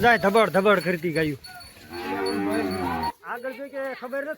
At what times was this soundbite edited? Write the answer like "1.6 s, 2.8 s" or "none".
3.1 s